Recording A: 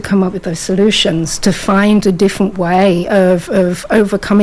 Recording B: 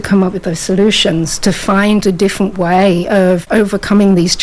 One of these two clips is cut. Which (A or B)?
B